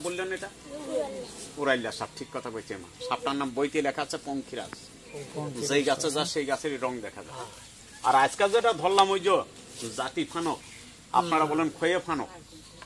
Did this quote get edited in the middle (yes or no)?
no